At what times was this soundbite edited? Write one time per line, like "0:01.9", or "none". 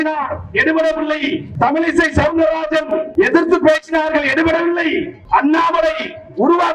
0:01.5
0:03.0
0:05.2